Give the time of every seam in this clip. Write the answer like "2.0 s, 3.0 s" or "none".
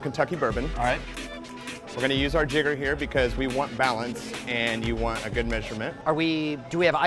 none